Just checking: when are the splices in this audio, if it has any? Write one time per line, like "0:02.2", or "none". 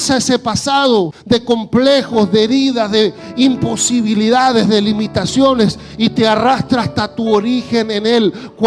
0:01.2